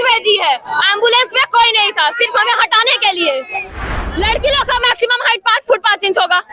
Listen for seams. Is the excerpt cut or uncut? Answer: cut